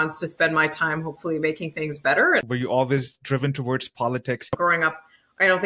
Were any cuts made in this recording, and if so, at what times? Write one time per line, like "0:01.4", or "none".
0:02.4
0:04.5